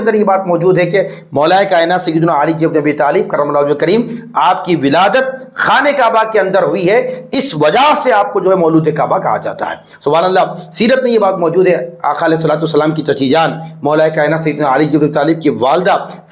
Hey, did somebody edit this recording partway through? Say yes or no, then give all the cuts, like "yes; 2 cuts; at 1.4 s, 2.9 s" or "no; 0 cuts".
no; 0 cuts